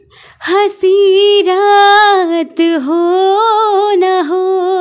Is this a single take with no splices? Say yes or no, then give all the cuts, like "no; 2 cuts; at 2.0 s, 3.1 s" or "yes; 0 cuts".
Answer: yes; 0 cuts